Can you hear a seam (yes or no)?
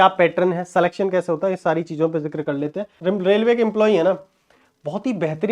yes